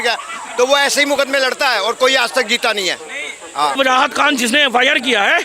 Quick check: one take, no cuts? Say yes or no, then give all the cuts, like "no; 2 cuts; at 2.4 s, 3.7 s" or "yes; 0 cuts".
no; 1 cut; at 3.8 s